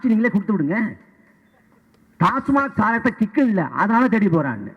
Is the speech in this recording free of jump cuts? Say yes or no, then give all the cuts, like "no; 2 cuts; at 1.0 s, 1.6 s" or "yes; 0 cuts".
yes; 0 cuts